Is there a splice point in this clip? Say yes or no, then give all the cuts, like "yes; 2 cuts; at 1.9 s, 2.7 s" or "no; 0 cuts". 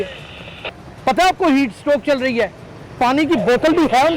no; 0 cuts